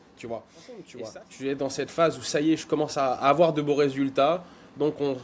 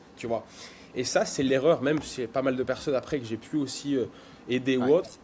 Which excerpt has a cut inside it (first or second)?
first